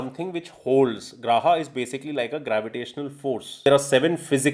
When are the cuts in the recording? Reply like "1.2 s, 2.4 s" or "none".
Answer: 3.6 s